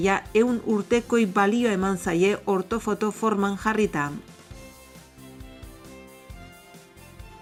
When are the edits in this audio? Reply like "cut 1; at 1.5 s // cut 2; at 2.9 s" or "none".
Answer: none